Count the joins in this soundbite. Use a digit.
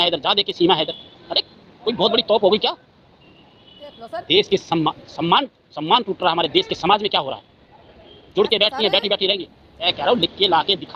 0